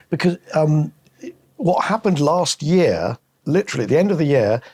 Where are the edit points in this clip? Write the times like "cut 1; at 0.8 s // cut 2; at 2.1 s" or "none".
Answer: cut 1; at 3.3 s